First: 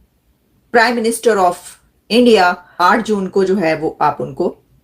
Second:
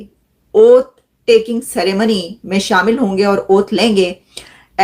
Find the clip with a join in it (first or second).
first